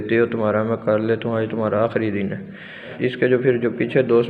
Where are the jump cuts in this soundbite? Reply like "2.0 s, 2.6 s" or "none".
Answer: 3.0 s